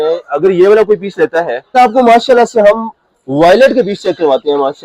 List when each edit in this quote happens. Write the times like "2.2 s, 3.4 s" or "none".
1.7 s